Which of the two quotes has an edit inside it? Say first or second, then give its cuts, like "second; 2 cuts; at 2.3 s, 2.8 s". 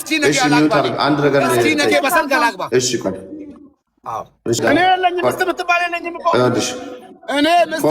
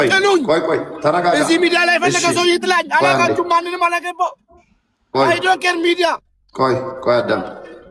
first; 1 cut; at 4.6 s